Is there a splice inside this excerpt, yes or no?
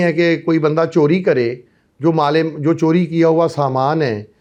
no